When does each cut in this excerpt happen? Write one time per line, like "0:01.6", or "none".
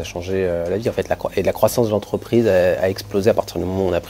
none